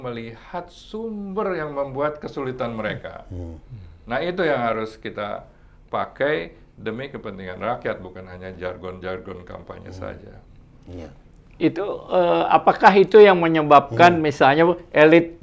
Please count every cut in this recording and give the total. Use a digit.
0